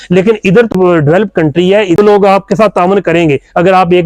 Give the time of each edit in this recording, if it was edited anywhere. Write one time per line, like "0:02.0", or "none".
0:00.7
0:02.0

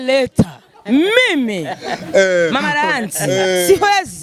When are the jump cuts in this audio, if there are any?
none

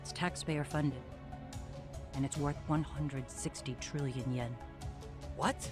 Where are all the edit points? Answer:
none

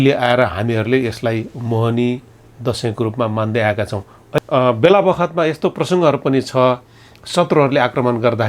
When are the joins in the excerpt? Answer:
0:04.4

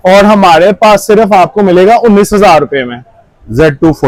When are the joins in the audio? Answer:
none

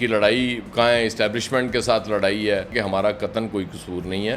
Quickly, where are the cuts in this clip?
0:02.7

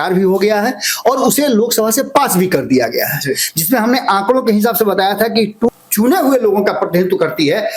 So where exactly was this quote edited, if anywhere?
0:05.7

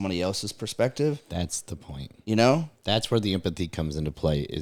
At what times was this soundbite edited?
none

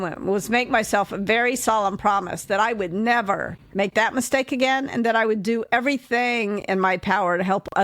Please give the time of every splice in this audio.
0:03.6

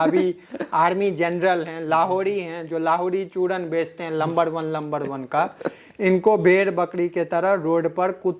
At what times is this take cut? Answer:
none

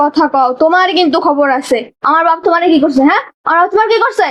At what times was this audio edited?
none

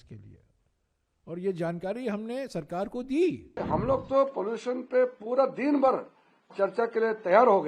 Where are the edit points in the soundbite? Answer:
0:03.5

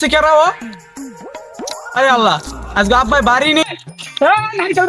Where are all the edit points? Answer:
0:03.6

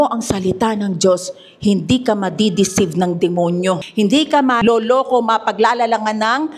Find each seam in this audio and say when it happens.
0:03.9
0:04.6

